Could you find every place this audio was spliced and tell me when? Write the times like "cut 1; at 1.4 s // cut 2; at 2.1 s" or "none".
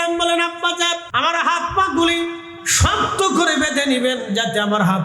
cut 1; at 1.1 s